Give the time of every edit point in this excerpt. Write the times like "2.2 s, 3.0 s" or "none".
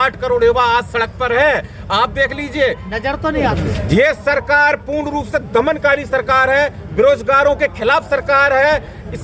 3.5 s